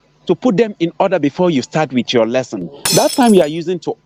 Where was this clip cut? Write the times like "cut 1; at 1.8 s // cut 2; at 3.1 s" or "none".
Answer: none